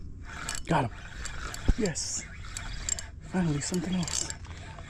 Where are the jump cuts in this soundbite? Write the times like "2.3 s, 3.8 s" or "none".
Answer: none